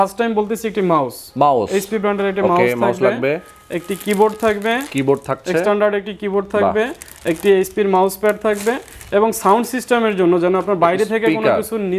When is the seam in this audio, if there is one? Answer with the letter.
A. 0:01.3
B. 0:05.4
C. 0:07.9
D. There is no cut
D